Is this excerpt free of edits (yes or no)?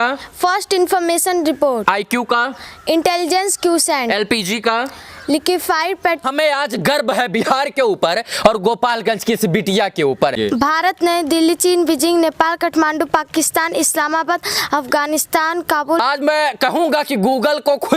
no